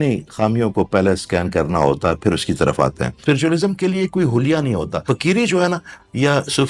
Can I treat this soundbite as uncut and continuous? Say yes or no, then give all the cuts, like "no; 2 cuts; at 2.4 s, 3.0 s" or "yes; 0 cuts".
no; 2 cuts; at 3.1 s, 5.0 s